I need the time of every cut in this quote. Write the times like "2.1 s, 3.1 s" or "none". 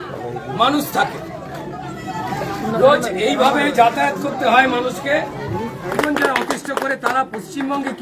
5.9 s